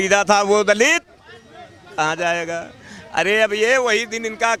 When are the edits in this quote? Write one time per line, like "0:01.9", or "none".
none